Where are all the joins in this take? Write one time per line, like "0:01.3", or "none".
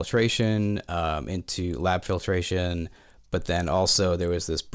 none